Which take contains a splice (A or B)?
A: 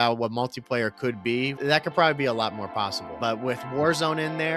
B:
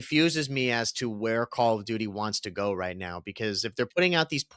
A